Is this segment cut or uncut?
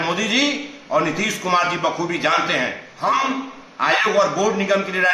cut